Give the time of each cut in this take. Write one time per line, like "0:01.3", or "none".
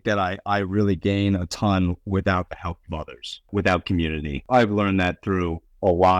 0:03.5
0:04.4